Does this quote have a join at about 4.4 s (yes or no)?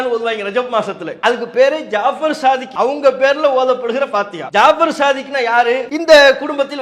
yes